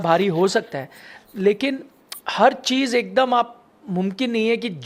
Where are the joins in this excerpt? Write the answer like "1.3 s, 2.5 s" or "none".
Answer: none